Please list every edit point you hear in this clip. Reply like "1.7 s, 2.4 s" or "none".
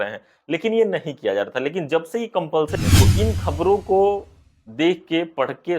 2.9 s